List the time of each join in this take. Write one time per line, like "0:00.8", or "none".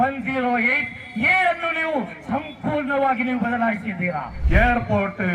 0:04.3